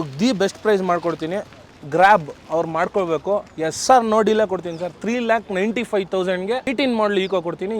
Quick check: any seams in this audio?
yes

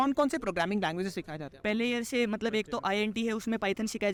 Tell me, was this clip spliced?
no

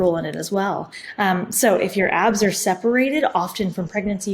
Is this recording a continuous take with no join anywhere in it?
no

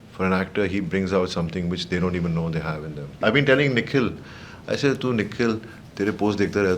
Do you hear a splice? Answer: yes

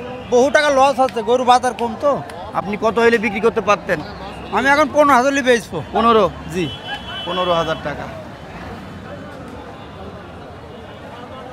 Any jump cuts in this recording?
no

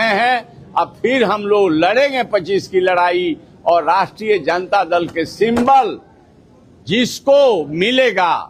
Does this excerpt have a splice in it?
no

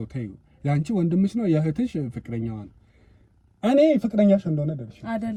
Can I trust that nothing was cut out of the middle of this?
yes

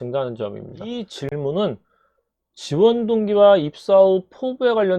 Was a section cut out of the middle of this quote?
yes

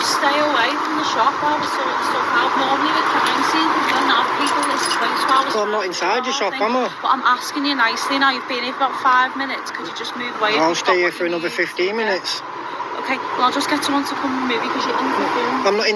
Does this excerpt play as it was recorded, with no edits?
yes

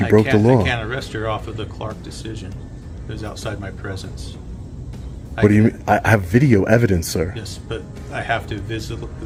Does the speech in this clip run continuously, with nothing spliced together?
yes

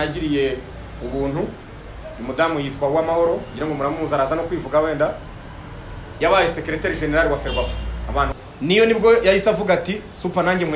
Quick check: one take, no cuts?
no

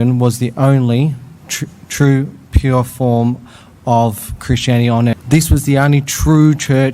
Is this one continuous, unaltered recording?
no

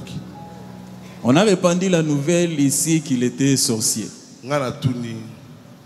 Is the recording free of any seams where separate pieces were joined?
yes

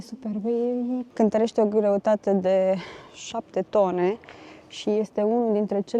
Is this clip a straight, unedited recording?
no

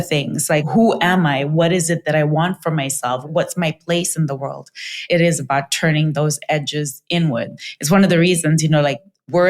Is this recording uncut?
no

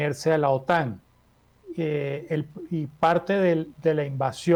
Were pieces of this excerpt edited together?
no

